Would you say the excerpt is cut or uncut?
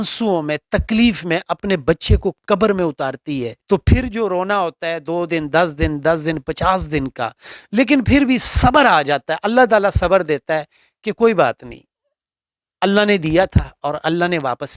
cut